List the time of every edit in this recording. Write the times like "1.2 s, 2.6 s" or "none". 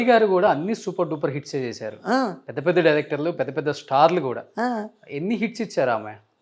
none